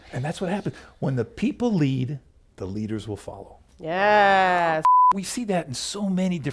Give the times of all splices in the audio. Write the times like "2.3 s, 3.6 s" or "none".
5.0 s